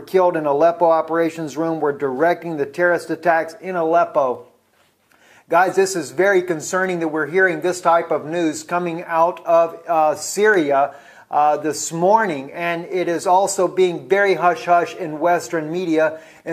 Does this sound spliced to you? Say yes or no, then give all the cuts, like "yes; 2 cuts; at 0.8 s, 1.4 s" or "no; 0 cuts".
no; 0 cuts